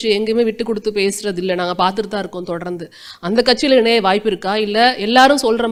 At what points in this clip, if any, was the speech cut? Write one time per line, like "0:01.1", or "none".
none

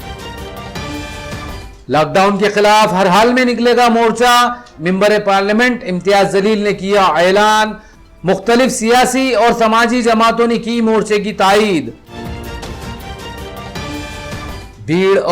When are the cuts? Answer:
0:01.2

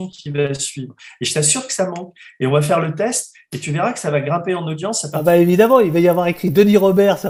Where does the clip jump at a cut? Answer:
none

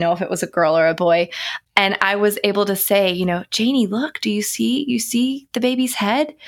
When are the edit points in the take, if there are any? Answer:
0:01.5

